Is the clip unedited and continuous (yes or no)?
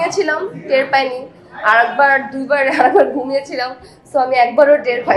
yes